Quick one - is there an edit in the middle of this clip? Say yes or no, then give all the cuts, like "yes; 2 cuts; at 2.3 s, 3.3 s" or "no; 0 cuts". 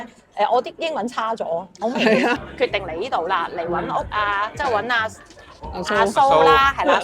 yes; 1 cut; at 2.4 s